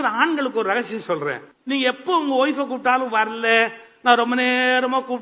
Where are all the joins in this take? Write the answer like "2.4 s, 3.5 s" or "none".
1.5 s

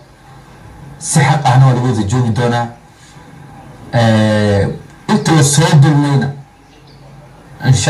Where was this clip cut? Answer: none

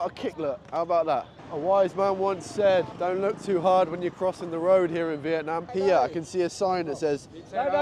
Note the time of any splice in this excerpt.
1.4 s, 2.9 s, 5.7 s

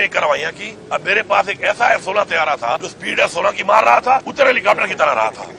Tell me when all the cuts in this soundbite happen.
3.0 s, 4.3 s

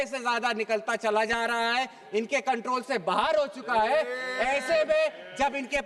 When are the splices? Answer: none

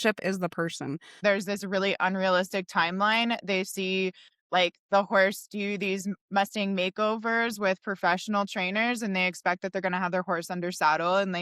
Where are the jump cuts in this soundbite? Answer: 1.2 s

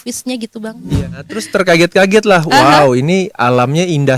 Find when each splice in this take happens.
1.1 s

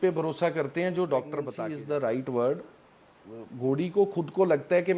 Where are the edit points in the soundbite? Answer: 1.5 s

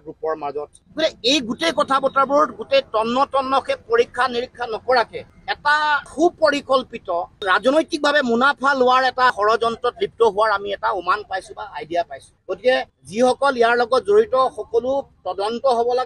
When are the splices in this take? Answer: none

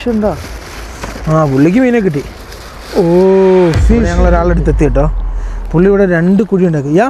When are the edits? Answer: 4.1 s

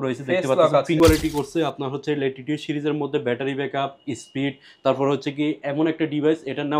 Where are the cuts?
1.0 s

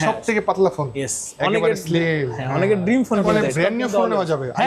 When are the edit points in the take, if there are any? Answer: 3.3 s

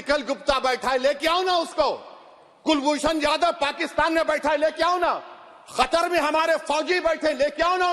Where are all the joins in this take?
none

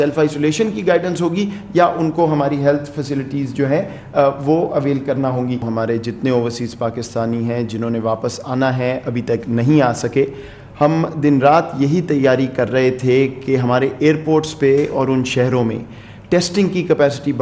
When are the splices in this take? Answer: 5.6 s

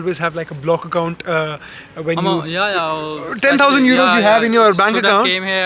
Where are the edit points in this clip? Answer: none

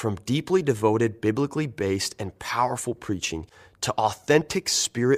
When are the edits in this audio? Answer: none

